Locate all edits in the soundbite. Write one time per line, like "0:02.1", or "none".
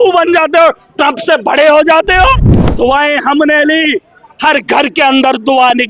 0:02.6